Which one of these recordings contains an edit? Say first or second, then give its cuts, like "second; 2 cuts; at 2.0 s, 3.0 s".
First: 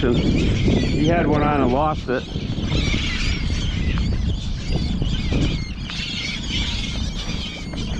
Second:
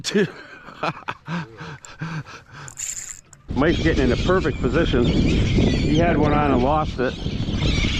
second; 1 cut; at 3.3 s